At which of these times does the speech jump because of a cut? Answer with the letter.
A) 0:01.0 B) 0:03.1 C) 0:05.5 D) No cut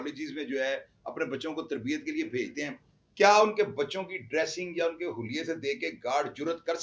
D